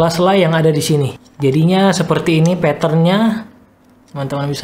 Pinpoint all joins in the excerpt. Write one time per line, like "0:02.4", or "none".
0:01.2